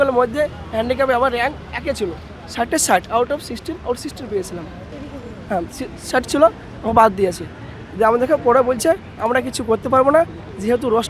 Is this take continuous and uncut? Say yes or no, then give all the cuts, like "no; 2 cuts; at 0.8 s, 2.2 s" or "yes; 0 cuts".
yes; 0 cuts